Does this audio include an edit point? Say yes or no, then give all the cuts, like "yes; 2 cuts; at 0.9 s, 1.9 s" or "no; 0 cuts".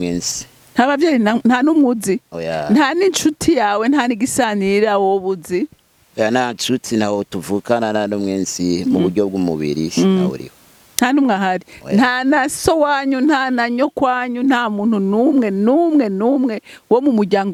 no; 0 cuts